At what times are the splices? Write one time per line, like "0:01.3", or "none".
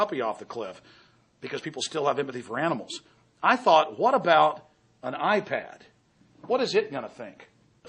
none